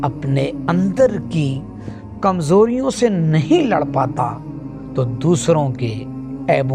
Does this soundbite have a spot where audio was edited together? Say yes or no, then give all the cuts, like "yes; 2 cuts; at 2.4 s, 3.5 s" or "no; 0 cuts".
no; 0 cuts